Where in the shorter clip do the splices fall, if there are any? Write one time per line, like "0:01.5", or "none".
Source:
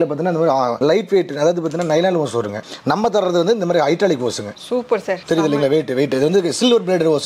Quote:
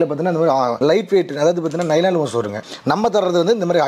none